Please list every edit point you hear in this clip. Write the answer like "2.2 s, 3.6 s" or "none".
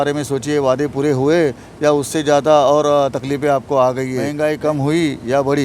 4.2 s